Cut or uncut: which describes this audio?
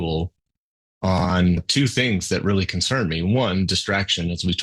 cut